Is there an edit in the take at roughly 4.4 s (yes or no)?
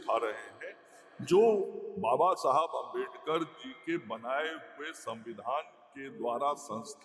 no